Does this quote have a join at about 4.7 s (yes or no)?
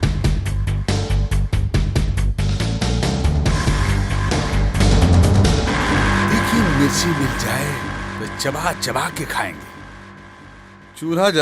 yes